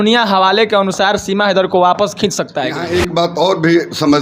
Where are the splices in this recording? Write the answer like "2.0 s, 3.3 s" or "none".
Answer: 2.8 s